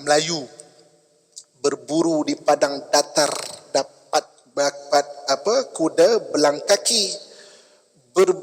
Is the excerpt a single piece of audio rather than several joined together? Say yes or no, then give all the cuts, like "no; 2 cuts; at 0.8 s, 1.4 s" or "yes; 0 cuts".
no; 1 cut; at 4.4 s